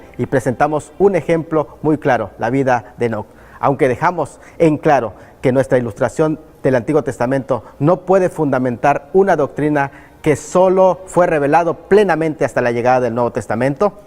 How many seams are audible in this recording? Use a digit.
1